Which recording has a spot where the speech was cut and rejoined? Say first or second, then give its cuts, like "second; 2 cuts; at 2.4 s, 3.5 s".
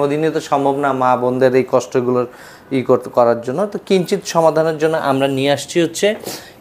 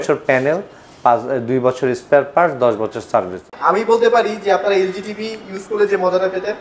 second; 1 cut; at 3.5 s